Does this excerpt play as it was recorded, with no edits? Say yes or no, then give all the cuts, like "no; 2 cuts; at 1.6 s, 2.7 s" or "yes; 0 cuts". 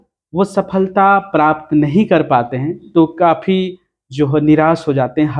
yes; 0 cuts